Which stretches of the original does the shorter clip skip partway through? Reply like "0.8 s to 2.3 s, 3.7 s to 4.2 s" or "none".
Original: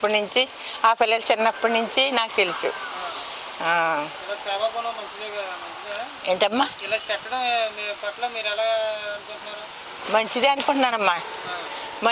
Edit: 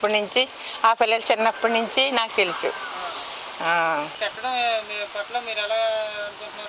4.2 s to 7.0 s